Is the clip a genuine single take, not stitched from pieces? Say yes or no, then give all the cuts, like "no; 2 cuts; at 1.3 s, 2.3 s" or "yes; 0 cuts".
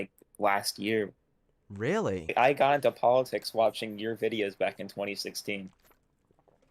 no; 1 cut; at 2.3 s